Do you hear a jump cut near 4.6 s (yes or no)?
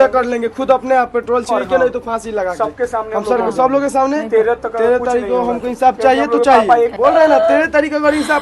no